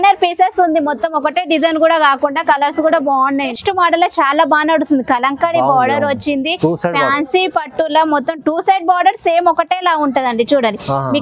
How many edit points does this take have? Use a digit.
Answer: 1